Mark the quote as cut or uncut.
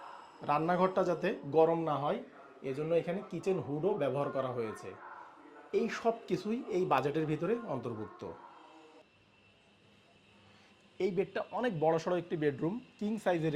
cut